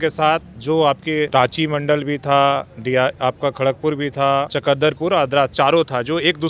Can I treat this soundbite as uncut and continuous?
no; 2 cuts; at 1.3 s, 4.5 s

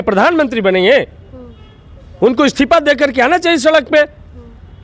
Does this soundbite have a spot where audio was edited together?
no; 0 cuts

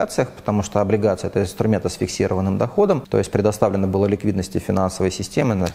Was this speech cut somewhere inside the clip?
yes; 1 cut; at 3.0 s

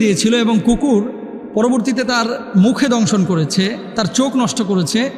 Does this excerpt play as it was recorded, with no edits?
yes; 0 cuts

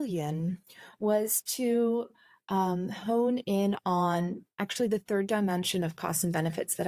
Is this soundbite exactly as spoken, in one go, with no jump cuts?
yes; 0 cuts

